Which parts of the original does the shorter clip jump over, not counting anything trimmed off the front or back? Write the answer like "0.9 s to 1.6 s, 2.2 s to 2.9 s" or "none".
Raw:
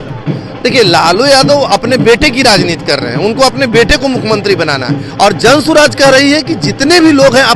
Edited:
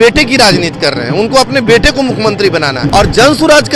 4.9 s to 5.1 s

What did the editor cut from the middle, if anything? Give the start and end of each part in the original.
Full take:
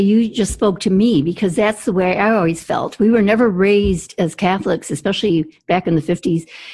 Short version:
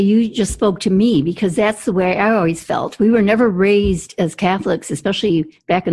none

